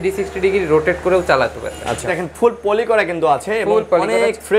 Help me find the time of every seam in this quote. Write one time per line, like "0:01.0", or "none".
0:02.2

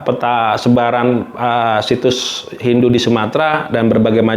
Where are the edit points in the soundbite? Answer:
none

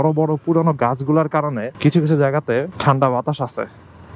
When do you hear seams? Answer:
0:01.7
0:02.7

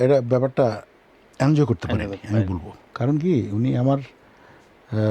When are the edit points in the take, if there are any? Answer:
none

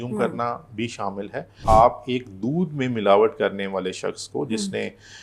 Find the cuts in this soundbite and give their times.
0:01.6

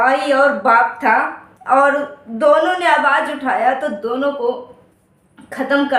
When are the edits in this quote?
none

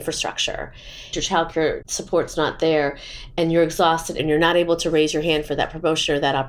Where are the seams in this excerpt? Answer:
0:01.1
0:04.2

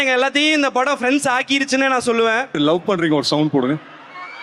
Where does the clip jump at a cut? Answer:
0:02.6

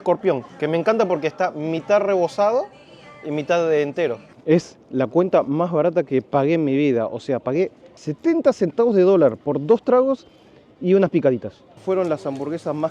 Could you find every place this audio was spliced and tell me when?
0:04.3
0:08.0
0:11.8

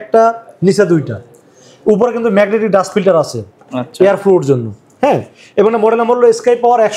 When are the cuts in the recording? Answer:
none

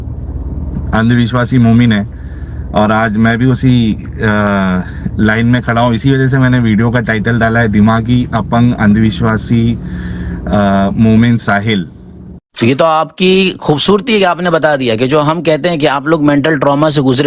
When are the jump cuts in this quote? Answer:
0:12.5

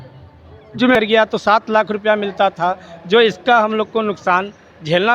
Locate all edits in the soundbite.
0:00.9

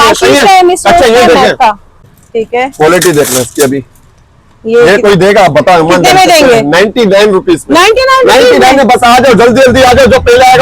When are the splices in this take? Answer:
0:02.0

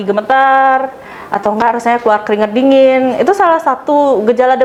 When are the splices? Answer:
none

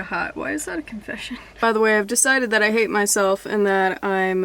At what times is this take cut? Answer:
0:01.4

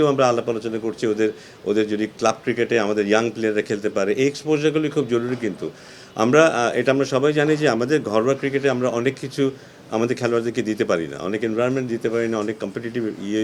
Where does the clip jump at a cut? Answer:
none

